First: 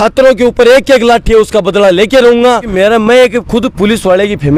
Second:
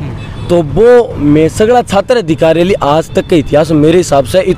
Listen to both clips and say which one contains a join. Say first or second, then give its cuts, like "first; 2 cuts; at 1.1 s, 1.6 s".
first; 1 cut; at 2.7 s